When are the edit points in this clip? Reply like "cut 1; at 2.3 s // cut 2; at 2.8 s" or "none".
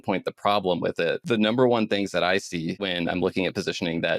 cut 1; at 1.2 s // cut 2; at 2.9 s